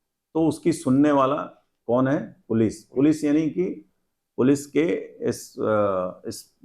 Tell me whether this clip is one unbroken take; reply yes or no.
yes